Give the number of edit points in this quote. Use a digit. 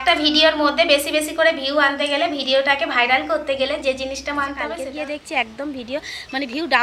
1